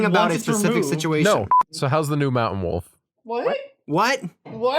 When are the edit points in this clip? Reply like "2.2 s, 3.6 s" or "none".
1.5 s